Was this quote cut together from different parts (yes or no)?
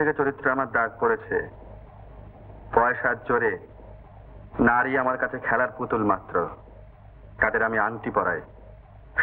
no